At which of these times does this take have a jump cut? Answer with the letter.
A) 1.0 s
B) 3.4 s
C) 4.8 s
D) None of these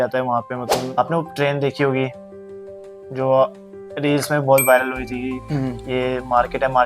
A